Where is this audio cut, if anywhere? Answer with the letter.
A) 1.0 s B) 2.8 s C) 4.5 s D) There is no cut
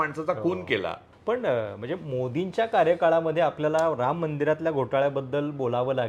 A